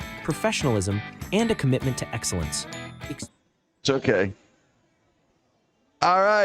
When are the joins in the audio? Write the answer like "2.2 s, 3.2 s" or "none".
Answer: none